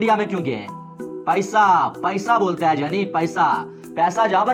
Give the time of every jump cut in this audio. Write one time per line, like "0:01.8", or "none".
none